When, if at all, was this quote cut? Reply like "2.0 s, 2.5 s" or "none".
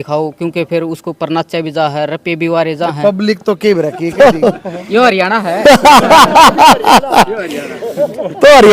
4.0 s